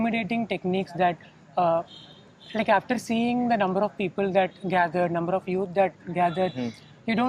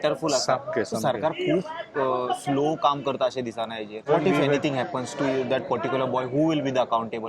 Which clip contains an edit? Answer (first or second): second